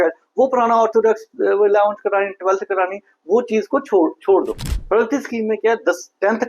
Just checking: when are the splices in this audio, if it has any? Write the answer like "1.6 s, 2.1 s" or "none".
4.7 s